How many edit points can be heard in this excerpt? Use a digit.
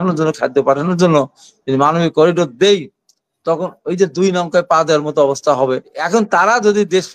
1